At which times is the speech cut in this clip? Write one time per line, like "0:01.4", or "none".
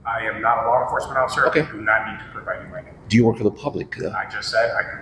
none